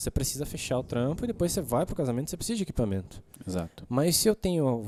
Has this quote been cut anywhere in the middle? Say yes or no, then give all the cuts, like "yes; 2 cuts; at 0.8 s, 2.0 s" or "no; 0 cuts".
no; 0 cuts